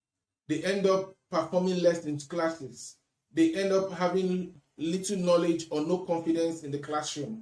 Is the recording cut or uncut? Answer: cut